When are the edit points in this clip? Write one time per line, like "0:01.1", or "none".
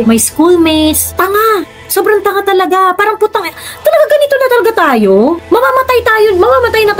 none